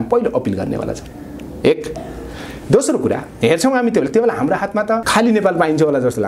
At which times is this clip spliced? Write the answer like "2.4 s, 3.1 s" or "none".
none